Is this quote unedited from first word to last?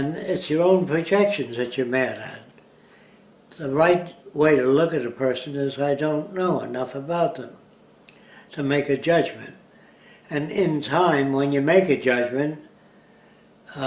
no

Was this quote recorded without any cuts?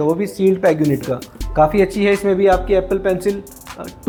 yes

